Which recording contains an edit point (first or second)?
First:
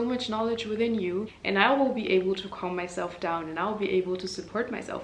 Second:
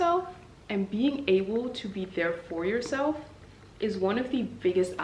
first